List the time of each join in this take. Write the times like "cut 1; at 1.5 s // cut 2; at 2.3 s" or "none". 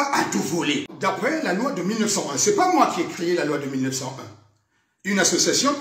cut 1; at 0.9 s